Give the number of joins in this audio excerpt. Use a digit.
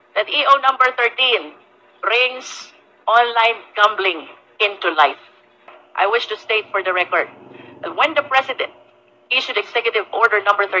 1